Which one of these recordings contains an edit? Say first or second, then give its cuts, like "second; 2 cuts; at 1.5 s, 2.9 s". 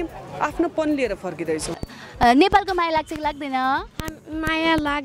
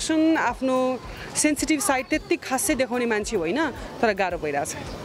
first; 1 cut; at 1.9 s